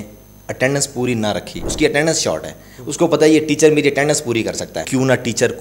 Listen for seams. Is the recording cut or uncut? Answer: cut